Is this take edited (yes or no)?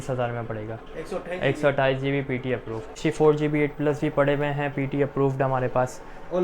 yes